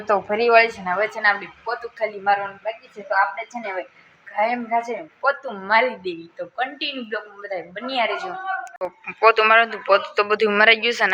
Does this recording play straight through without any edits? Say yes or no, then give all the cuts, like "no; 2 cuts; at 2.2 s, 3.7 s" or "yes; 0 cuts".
yes; 0 cuts